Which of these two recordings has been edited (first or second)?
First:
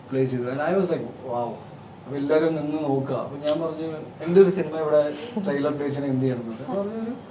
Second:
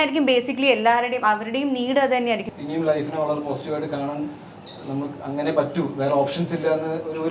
second